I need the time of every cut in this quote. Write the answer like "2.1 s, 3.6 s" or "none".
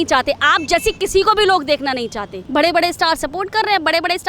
2.4 s